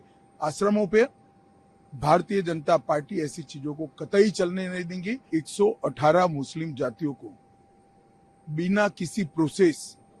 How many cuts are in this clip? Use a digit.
1